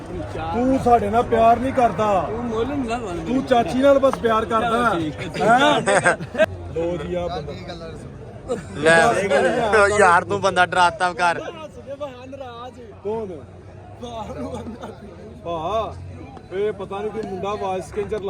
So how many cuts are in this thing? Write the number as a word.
one